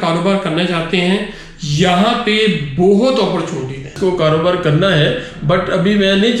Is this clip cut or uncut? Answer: cut